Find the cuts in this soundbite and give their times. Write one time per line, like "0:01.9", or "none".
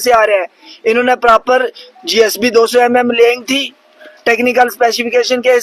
none